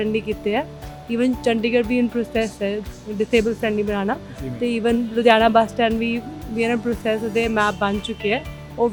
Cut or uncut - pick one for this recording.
uncut